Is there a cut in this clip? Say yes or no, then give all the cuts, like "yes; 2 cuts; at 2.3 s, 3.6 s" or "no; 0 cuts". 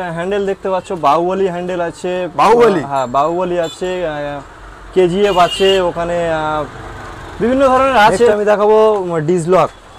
yes; 1 cut; at 8.3 s